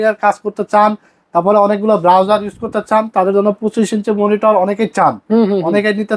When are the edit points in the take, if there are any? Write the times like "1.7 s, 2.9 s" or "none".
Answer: none